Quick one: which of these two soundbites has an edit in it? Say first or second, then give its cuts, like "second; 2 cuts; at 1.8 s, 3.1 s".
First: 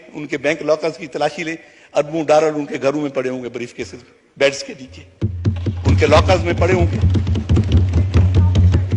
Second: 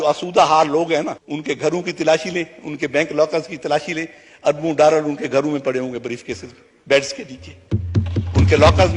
second; 1 cut; at 1.2 s